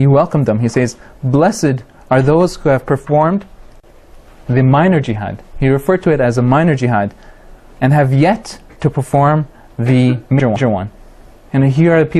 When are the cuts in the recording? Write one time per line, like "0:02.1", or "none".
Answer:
0:09.6